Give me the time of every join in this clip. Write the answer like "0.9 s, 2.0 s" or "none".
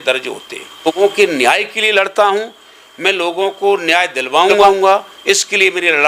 0.9 s, 4.6 s